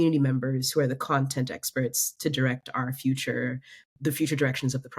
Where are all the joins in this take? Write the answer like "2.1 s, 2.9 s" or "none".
3.7 s